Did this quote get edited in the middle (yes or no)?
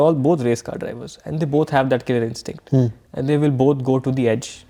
no